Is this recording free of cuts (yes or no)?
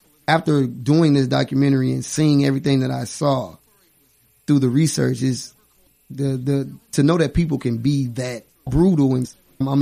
no